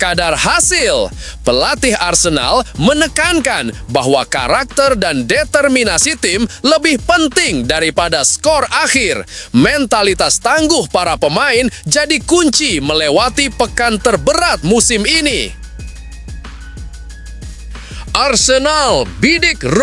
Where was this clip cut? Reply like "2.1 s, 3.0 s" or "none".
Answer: 15.8 s, 17.6 s